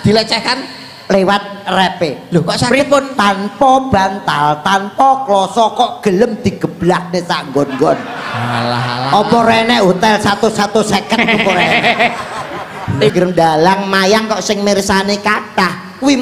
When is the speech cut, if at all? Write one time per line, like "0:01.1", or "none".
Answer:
0:13.1